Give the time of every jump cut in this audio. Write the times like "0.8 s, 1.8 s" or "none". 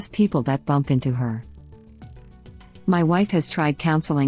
2.1 s